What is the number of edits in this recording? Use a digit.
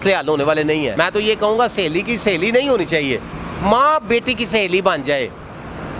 1